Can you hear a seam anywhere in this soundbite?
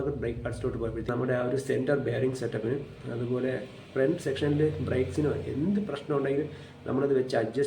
yes; 1 cut; at 1.0 s

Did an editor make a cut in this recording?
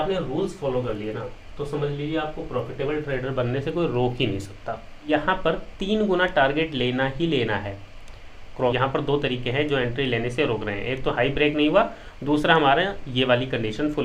yes; 2 cuts; at 5.1 s, 8.7 s

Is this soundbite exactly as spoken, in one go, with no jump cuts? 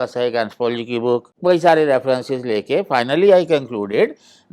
no; 1 cut; at 1.3 s

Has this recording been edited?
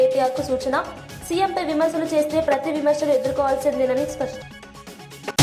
yes; 1 cut; at 4.3 s

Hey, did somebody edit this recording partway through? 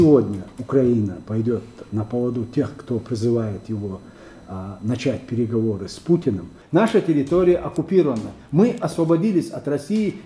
yes; 1 cut; at 6.5 s

